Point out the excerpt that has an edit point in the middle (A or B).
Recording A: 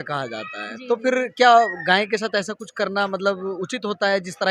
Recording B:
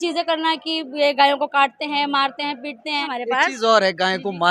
B